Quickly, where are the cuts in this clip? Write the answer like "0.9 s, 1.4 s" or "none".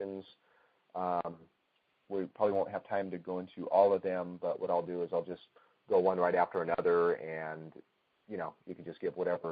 3.3 s